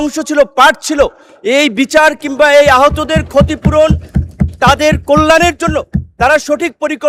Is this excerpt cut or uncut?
uncut